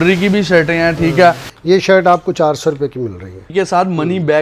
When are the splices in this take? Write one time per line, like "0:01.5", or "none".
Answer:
0:01.5
0:03.4